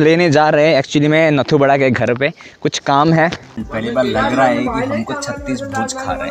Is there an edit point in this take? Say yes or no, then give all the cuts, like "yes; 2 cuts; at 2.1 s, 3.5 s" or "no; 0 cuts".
yes; 1 cut; at 3.6 s